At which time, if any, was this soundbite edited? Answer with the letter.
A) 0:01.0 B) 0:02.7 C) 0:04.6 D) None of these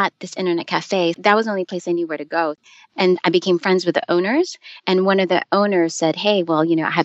B